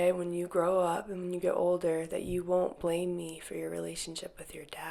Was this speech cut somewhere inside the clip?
no; 0 cuts

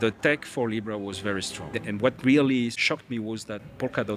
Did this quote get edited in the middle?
yes; 2 cuts; at 1.8 s, 2.8 s

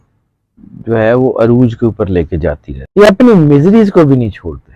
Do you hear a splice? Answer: yes; 1 cut; at 2.7 s

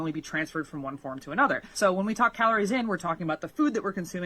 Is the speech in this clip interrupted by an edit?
yes; 1 cut; at 1.7 s

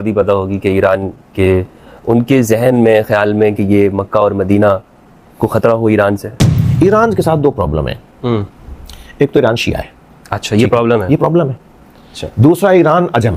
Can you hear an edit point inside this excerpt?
yes; 1 cut; at 6.6 s

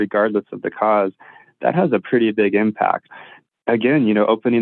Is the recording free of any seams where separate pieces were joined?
no; 1 cut; at 3.1 s

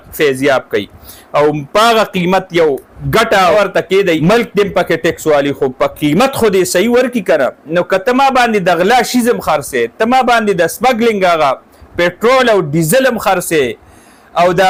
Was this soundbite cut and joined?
no; 0 cuts

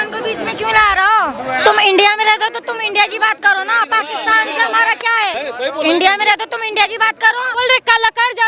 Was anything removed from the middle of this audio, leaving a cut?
yes; 2 cuts; at 5.3 s, 7.5 s

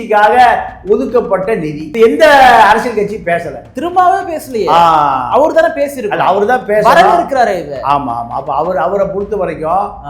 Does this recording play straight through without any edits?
no; 1 cut; at 1.8 s

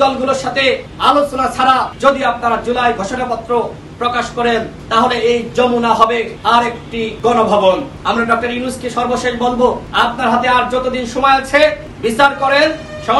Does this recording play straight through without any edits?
no; 7 cuts; at 0.9 s, 1.9 s, 4.8 s, 6.8 s, 7.9 s, 9.8 s, 11.9 s

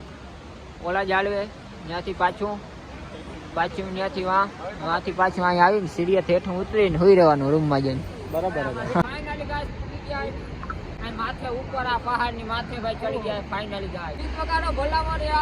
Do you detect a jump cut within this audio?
yes; 2 cuts; at 9.0 s, 14.2 s

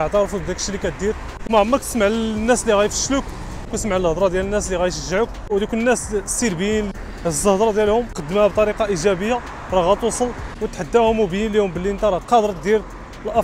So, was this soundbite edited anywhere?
yes; 1 cut; at 1.3 s

